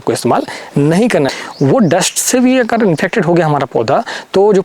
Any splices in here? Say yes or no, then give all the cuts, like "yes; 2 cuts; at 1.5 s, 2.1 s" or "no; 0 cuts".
yes; 1 cut; at 1.3 s